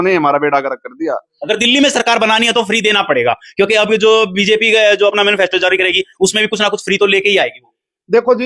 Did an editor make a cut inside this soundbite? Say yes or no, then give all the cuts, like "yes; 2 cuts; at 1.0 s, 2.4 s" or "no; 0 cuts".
no; 0 cuts